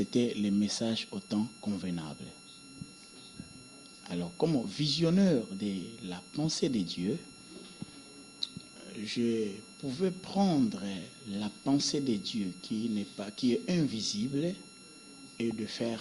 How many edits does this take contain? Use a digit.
0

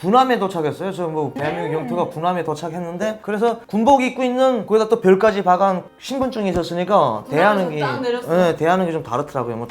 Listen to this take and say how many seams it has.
2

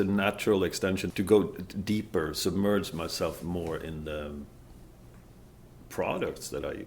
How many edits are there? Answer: 1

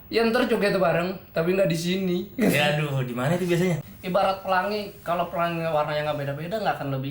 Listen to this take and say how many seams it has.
1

